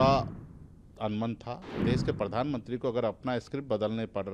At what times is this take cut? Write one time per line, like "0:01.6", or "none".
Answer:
0:01.8